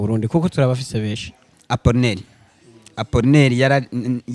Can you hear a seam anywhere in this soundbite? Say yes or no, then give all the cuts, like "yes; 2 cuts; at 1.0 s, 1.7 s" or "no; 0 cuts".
yes; 1 cut; at 1.5 s